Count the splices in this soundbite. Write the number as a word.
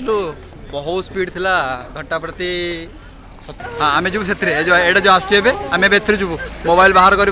one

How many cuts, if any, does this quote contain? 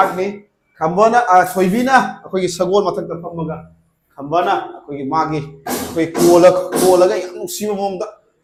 zero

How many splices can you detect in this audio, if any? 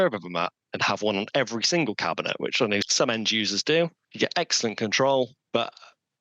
three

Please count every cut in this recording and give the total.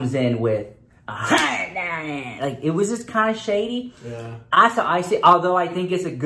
zero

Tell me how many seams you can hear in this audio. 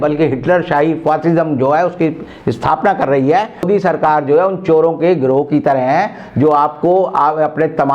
one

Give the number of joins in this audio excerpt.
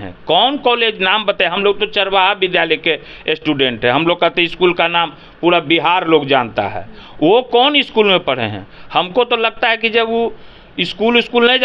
zero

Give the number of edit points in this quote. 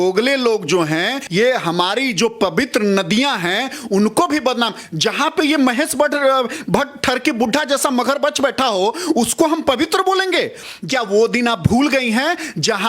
two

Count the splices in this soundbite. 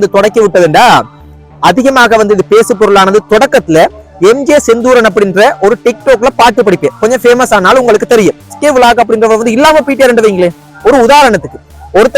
one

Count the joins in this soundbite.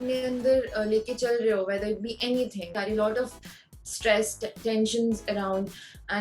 one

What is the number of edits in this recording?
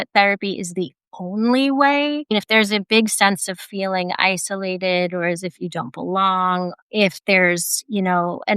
two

